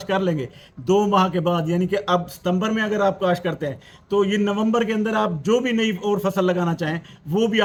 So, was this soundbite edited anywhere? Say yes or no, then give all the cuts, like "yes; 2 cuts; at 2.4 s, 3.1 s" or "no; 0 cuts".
no; 0 cuts